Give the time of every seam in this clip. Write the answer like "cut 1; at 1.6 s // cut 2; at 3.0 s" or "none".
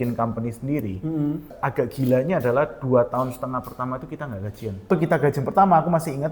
cut 1; at 1.6 s // cut 2; at 4.8 s